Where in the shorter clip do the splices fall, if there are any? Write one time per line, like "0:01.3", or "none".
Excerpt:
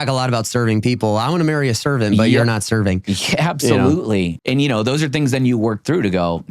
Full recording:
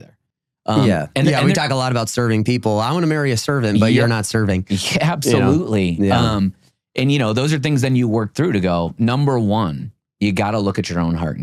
0:04.3